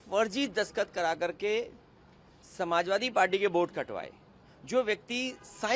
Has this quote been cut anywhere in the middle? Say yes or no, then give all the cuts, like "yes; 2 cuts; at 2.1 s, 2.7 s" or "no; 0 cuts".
no; 0 cuts